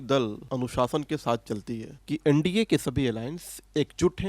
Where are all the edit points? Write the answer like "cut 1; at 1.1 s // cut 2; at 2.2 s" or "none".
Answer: cut 1; at 2.0 s